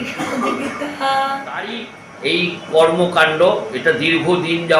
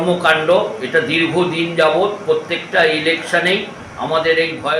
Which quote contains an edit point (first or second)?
first